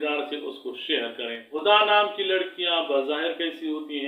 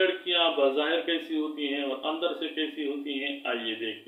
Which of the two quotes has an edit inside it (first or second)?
first